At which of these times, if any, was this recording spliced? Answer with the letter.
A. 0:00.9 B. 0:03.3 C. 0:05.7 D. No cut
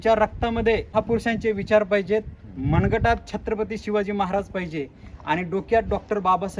A